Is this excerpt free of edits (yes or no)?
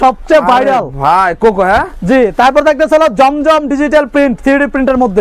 yes